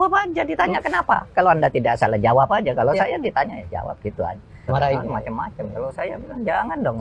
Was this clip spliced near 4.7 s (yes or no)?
yes